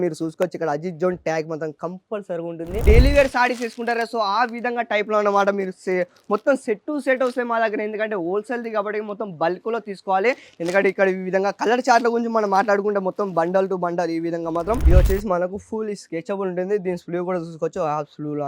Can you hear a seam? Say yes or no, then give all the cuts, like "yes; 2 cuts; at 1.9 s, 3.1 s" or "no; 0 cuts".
yes; 2 cuts; at 2.8 s, 14.8 s